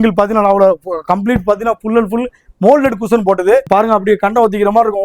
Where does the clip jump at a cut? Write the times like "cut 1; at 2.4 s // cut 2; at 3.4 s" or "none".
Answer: cut 1; at 3.7 s